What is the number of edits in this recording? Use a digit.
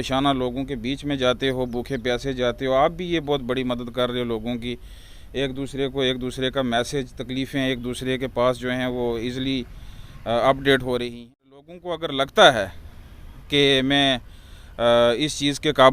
1